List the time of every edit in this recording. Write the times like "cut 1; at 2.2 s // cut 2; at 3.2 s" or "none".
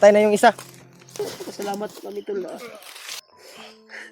cut 1; at 1.2 s